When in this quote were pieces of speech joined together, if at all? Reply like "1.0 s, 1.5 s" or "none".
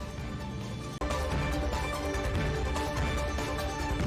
none